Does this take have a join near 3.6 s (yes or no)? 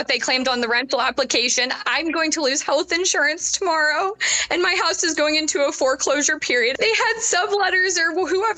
no